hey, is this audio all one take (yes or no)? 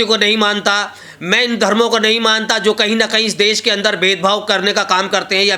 yes